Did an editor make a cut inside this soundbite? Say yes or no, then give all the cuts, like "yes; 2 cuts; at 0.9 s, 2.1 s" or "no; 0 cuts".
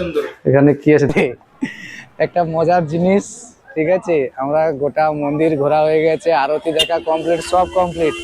yes; 1 cut; at 1.1 s